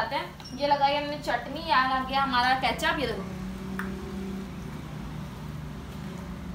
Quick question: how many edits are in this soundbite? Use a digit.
0